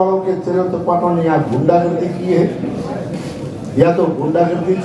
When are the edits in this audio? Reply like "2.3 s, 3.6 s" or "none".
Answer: none

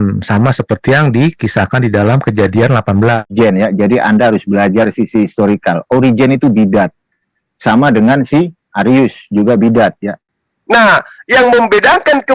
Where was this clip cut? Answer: 3.3 s, 10.2 s

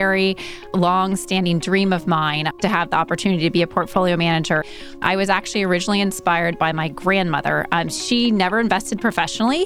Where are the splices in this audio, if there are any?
2.6 s, 4.7 s

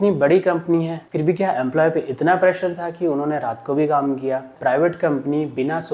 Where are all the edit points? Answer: 1.0 s, 4.5 s

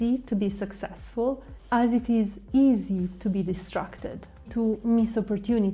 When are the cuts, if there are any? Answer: 4.5 s

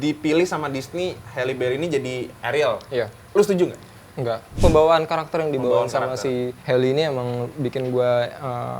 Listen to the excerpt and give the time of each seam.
4.6 s

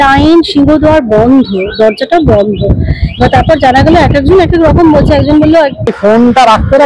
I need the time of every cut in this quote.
5.9 s

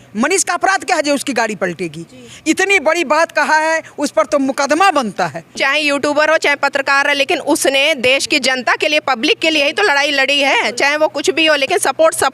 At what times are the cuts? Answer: 5.5 s

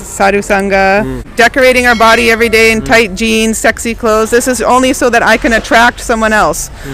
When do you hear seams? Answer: 1.2 s

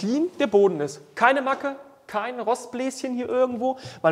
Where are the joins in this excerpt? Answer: none

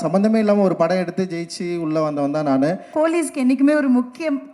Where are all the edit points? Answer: 2.9 s

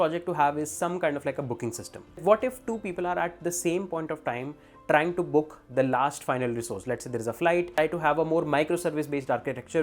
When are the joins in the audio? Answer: 2.2 s, 7.8 s

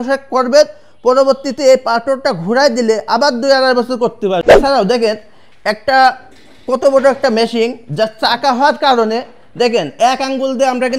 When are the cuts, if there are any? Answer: 4.4 s

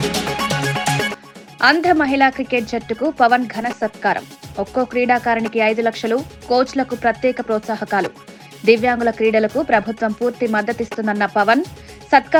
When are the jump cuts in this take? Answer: none

